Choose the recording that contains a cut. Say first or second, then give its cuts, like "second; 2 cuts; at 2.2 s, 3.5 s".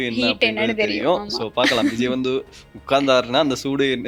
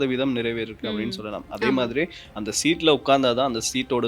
second; 1 cut; at 2.3 s